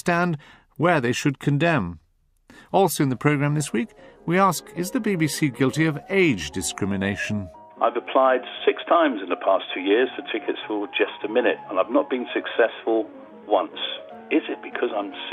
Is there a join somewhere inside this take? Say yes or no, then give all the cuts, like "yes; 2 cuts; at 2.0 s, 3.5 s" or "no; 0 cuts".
yes; 1 cut; at 5.7 s